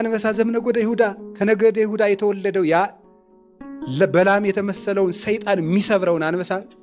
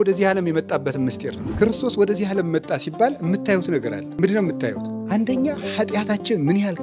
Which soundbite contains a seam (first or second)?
second